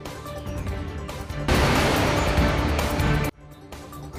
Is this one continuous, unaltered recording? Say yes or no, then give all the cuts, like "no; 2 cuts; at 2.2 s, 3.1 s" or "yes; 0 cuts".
yes; 0 cuts